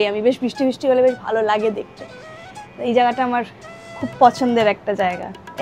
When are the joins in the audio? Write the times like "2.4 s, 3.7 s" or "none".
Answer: none

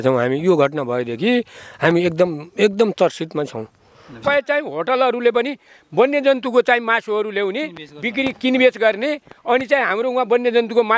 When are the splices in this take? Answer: 4.2 s

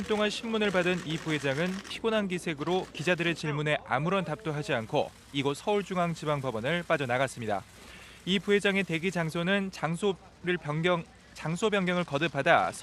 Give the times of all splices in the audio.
none

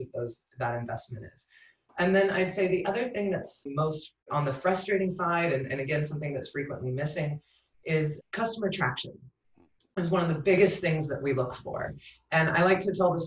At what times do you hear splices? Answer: 4.0 s, 8.2 s

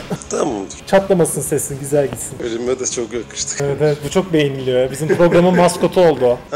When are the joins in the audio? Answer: none

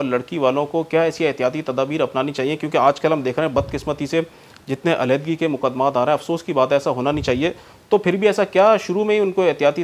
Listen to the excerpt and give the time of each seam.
none

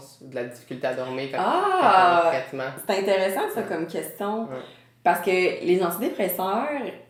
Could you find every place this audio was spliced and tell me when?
none

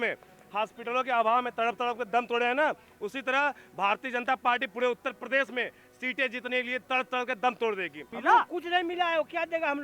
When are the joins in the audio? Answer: 8.0 s

